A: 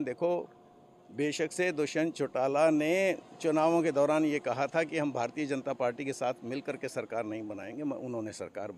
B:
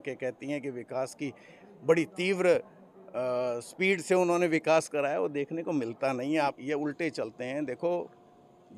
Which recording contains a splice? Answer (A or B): B